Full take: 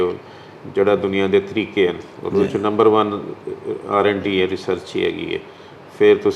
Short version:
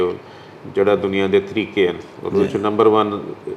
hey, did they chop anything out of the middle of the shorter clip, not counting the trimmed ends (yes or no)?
no